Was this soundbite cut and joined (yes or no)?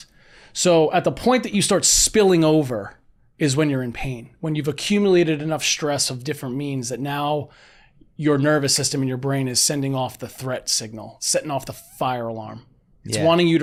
no